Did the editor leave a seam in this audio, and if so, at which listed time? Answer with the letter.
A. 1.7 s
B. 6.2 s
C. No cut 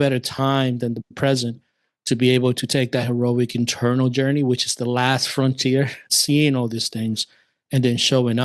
B